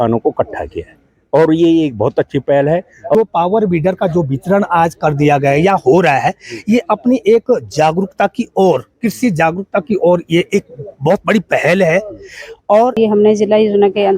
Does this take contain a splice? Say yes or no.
yes